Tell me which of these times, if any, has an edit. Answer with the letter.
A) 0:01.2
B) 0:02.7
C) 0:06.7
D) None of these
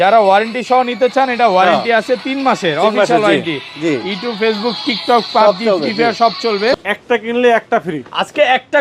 C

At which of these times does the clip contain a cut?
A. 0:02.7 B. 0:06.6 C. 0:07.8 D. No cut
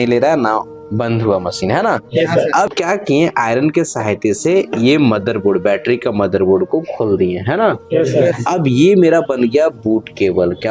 A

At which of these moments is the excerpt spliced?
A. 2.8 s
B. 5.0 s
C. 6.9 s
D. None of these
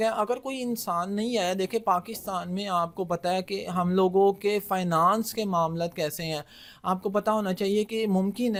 D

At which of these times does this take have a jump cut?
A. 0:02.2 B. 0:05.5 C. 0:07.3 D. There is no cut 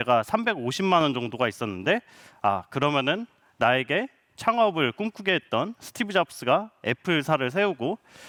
D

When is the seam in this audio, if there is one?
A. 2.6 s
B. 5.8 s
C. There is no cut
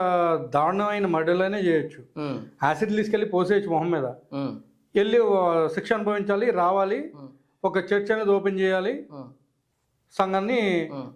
C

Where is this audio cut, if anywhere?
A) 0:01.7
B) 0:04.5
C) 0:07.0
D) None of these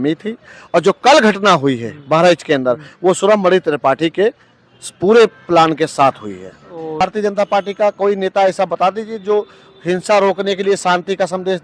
C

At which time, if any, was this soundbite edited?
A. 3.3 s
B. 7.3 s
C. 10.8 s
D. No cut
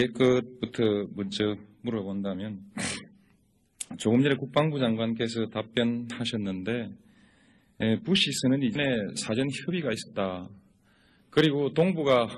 A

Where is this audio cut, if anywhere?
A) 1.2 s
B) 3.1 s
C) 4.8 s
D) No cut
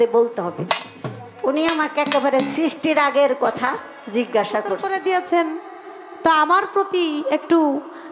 C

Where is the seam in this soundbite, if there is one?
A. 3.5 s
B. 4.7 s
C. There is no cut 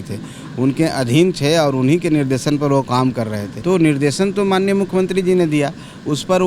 A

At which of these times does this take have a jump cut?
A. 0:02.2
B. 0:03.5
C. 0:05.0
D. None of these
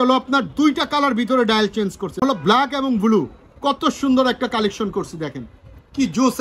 A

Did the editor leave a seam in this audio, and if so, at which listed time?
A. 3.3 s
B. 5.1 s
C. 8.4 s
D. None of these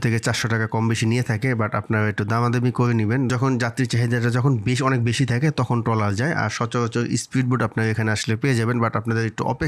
A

